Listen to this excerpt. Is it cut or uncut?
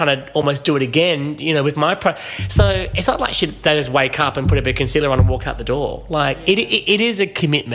uncut